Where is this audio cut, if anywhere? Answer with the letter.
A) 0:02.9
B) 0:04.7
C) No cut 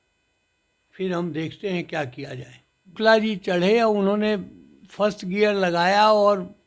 A